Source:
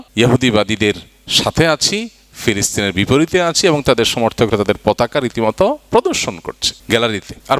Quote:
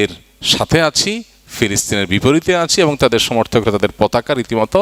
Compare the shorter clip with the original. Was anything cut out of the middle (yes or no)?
no